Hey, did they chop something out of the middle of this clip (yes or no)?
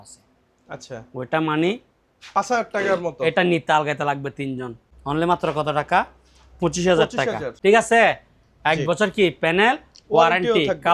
yes